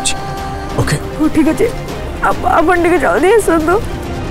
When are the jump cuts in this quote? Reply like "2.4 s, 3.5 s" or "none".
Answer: 1.1 s